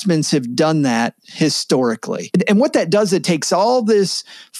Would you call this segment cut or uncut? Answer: cut